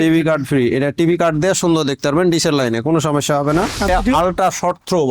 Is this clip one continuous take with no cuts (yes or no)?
no